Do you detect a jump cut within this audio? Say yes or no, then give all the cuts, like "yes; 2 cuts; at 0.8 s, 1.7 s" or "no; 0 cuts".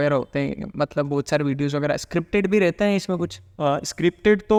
no; 0 cuts